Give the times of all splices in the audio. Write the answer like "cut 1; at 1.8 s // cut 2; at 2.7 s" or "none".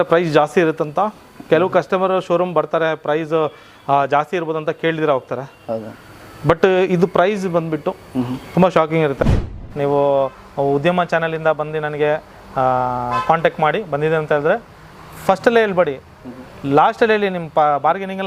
cut 1; at 9.4 s